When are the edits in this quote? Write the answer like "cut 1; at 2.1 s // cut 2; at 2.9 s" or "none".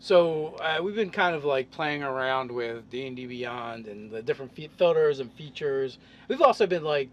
cut 1; at 2.2 s